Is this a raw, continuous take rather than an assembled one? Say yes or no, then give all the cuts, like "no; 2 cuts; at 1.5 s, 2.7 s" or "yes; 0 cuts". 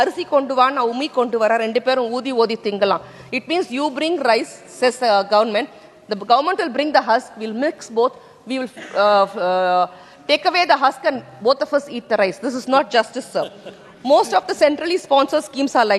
yes; 0 cuts